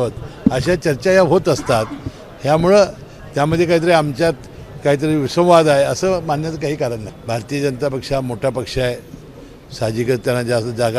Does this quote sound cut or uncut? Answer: cut